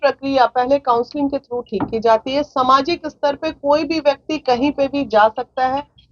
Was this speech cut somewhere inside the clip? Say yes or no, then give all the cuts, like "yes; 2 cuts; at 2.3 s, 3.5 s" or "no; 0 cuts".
no; 0 cuts